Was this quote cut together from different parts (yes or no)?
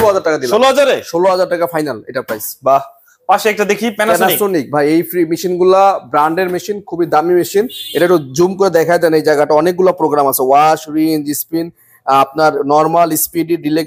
no